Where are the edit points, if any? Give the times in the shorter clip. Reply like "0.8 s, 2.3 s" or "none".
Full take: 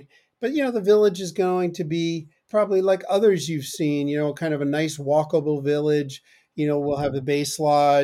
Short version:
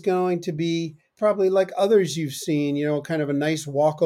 none